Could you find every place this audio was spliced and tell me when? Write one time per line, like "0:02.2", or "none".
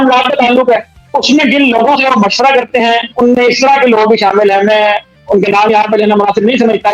none